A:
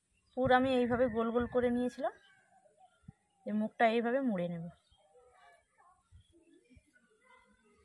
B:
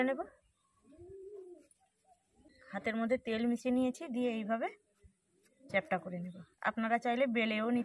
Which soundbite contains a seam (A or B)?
B